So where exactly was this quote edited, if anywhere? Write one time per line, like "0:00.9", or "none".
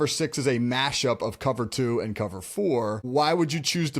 0:03.0